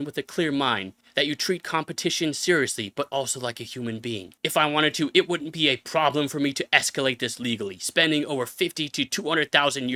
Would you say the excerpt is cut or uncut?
uncut